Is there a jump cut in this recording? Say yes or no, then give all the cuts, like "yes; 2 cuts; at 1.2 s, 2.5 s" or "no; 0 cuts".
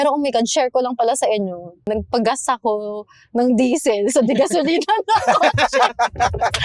yes; 1 cut; at 1.9 s